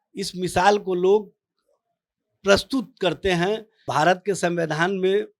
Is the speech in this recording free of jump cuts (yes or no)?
no